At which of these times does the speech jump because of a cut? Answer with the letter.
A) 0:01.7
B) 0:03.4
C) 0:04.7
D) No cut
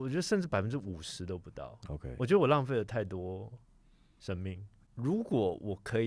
C